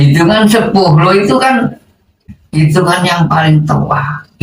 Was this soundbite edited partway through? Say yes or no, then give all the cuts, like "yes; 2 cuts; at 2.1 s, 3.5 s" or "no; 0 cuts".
no; 0 cuts